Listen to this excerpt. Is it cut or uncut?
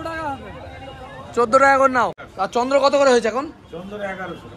cut